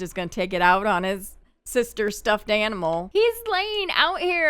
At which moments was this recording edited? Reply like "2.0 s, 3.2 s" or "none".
3.0 s